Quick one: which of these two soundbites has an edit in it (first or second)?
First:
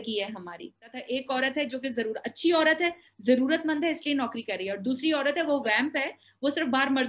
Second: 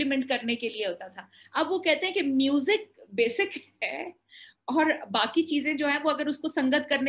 first